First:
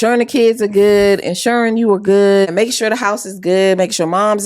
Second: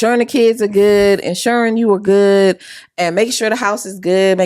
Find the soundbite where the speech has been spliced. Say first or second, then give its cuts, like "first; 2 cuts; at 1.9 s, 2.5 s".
first; 1 cut; at 2.5 s